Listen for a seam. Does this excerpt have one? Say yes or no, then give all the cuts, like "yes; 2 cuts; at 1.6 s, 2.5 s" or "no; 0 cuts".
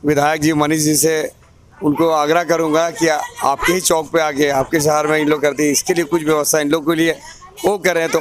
no; 0 cuts